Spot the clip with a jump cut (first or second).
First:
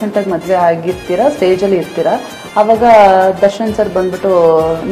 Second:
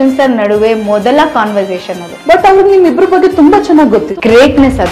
second